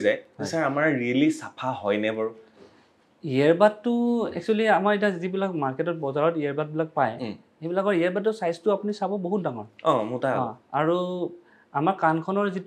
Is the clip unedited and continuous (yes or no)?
yes